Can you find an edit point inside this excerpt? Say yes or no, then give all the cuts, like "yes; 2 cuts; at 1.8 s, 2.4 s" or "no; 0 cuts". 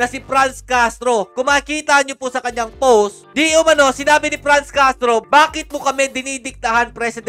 no; 0 cuts